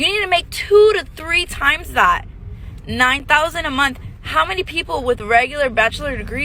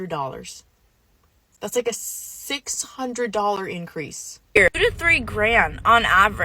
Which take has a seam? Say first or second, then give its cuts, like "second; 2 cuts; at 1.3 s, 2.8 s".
second; 1 cut; at 4.6 s